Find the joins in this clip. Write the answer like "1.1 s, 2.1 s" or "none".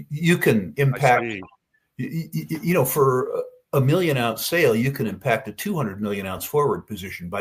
none

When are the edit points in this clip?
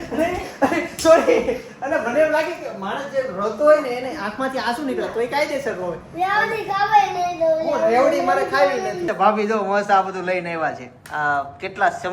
9.1 s

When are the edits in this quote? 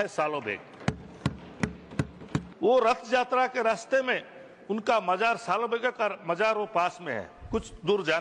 2.5 s

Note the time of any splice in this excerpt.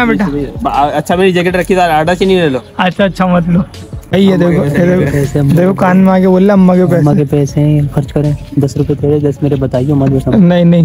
4.1 s

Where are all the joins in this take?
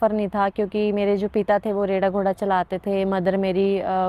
none

